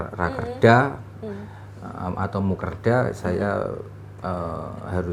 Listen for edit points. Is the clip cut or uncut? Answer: uncut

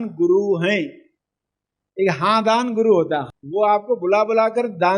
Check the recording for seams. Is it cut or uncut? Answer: cut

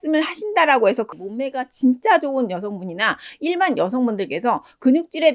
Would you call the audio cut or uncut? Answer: cut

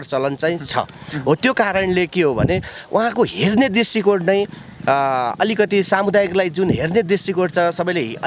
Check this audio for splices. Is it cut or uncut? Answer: uncut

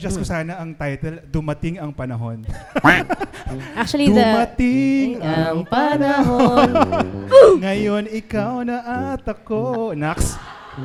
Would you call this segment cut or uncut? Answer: uncut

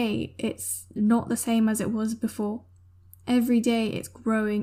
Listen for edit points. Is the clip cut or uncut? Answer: uncut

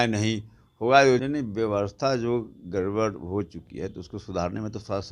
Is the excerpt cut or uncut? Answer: cut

